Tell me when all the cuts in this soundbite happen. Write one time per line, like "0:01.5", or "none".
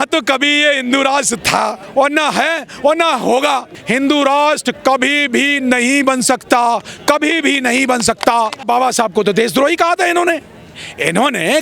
0:01.8
0:03.7
0:08.6